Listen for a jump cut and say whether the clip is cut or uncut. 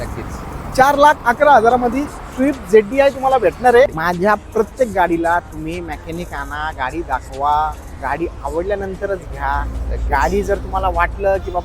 cut